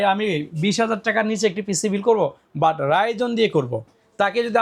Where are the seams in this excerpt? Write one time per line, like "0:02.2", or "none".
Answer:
none